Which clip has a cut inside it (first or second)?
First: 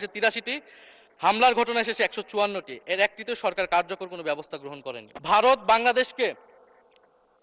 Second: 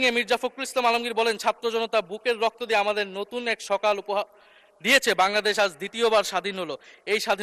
first